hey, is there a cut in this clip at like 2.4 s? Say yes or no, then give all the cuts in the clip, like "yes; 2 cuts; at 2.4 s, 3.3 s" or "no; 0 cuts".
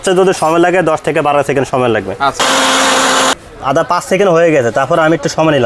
yes; 2 cuts; at 2.4 s, 3.4 s